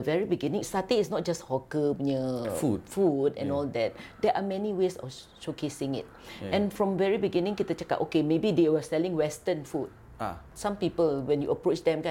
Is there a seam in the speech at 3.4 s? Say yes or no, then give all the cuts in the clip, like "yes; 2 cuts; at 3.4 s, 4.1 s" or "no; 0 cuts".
no; 0 cuts